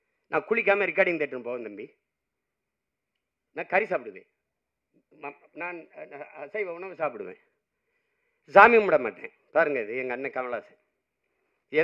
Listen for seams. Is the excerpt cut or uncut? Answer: uncut